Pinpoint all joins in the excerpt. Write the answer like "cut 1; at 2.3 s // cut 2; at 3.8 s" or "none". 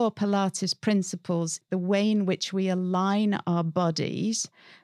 cut 1; at 1.6 s